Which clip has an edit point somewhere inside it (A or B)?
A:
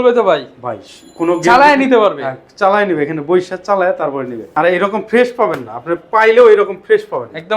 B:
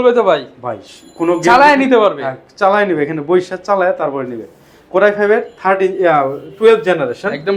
A